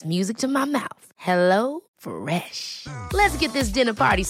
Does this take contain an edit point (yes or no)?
no